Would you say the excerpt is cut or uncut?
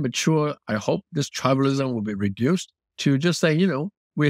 uncut